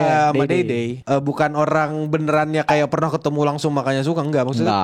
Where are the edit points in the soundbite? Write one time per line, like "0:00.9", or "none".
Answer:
none